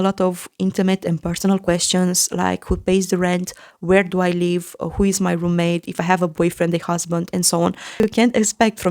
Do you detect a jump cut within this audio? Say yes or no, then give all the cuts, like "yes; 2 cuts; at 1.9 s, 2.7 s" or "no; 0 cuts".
yes; 1 cut; at 8.0 s